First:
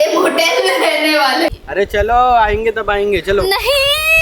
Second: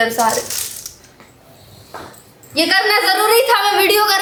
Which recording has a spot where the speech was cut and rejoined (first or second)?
first